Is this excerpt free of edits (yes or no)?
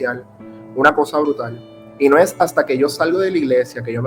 yes